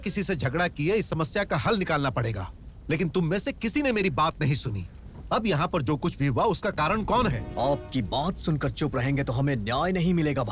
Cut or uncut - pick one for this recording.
cut